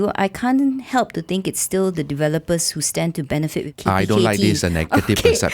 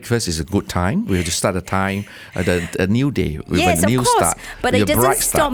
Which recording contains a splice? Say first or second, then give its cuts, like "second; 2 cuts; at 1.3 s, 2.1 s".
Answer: first; 1 cut; at 3.7 s